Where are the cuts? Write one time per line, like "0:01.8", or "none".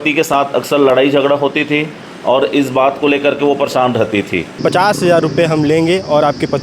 0:04.6

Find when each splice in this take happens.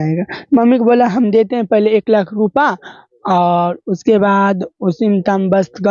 none

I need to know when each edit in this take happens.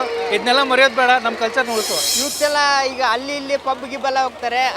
0:02.1

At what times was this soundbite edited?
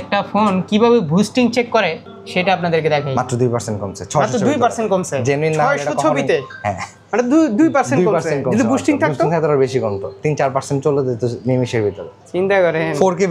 none

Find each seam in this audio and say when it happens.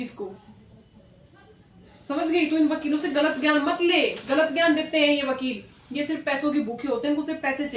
none

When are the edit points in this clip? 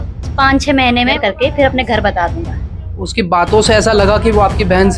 0:01.2
0:02.9

